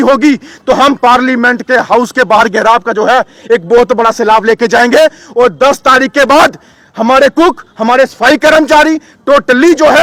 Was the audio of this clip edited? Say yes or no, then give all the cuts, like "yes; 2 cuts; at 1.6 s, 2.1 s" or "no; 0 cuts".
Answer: no; 0 cuts